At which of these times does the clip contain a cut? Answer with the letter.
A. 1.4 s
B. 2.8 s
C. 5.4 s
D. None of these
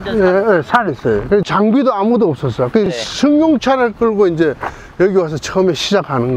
A